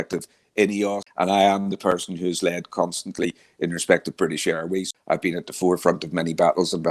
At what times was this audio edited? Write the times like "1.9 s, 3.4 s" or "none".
1.0 s, 4.9 s